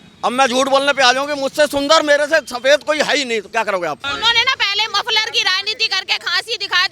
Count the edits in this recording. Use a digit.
1